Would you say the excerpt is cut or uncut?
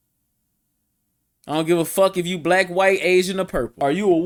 uncut